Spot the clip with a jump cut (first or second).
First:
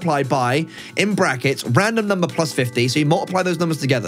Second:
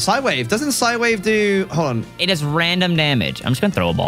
second